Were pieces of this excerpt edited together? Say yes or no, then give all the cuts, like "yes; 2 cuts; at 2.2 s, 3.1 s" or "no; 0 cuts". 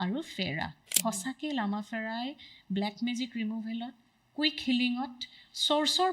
yes; 1 cut; at 1.0 s